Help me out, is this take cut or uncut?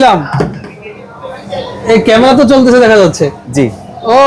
uncut